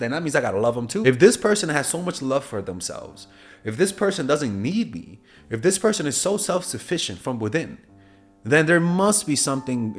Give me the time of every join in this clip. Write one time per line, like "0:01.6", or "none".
0:01.0